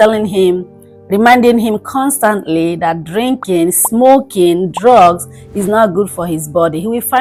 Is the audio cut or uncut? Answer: uncut